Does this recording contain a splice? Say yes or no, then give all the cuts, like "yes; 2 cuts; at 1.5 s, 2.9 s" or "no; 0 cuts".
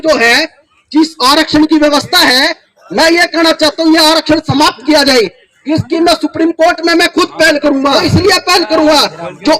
yes; 1 cut; at 8.0 s